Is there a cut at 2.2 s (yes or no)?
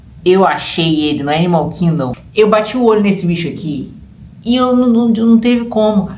yes